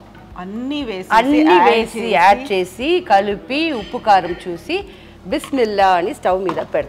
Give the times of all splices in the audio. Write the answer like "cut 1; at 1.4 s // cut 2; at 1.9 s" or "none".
none